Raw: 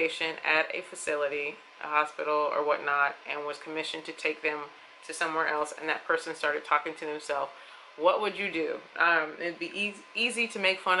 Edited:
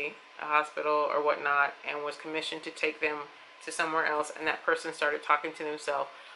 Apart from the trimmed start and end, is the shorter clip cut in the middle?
no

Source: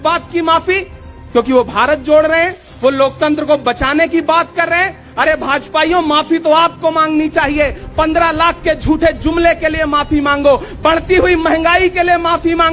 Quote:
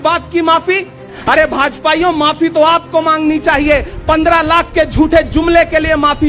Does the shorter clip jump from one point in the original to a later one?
yes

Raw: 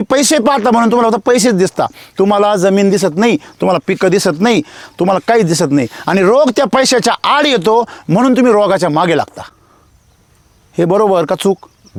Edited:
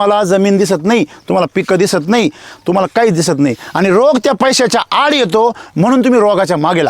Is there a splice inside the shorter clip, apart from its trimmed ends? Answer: no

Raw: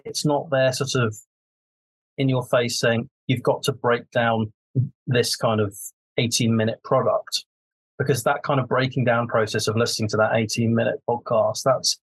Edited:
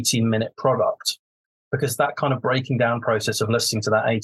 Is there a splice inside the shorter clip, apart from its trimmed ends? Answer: no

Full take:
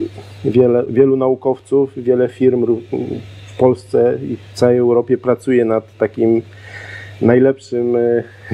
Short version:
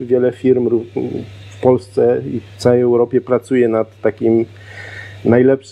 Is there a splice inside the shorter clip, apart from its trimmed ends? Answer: no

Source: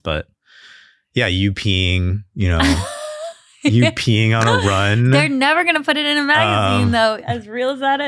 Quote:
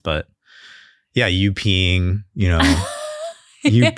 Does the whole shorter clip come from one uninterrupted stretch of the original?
yes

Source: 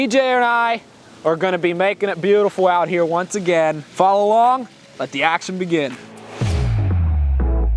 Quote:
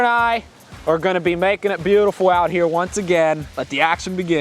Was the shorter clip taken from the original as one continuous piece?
no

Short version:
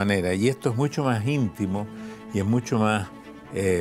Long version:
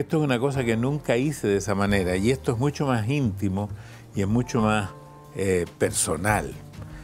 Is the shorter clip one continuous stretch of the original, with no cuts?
yes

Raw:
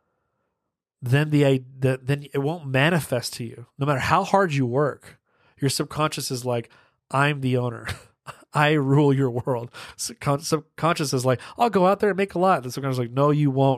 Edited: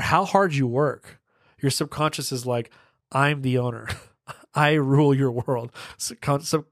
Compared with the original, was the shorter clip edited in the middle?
no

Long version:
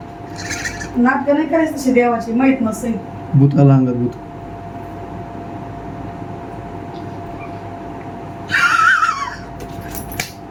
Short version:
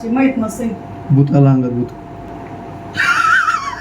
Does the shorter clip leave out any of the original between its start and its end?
yes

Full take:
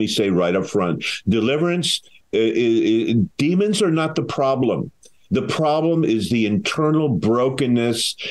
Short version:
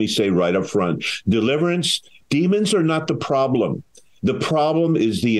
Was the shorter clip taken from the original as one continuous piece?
no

